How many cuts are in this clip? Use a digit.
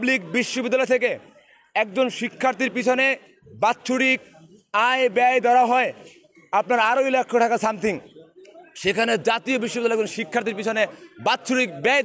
0